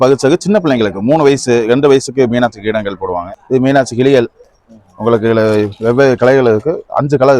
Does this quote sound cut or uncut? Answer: cut